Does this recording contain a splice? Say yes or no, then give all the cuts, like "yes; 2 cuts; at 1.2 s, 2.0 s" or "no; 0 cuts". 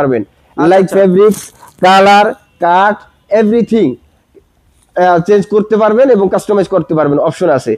no; 0 cuts